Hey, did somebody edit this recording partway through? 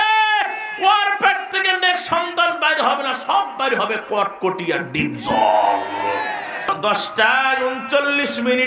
yes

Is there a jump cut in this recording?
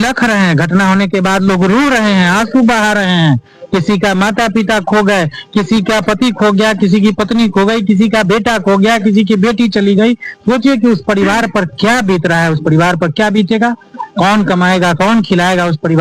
no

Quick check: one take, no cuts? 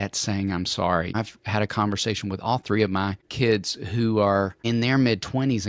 no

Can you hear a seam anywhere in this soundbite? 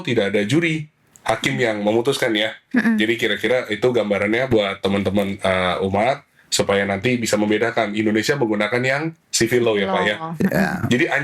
no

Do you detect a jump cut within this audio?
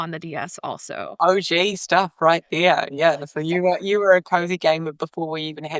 yes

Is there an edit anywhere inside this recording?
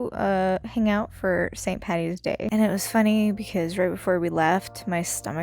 yes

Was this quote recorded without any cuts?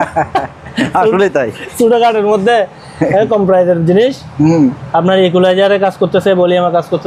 yes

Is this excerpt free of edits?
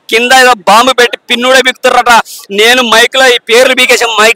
yes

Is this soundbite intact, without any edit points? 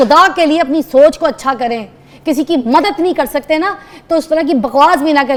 yes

